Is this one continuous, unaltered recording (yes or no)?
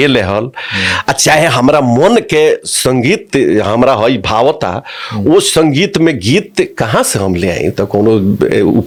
yes